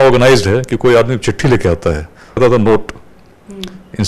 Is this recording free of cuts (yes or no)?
no